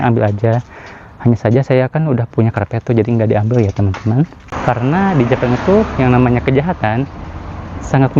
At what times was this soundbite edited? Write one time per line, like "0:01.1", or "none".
0:04.5